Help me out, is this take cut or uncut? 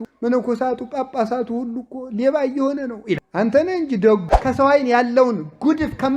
cut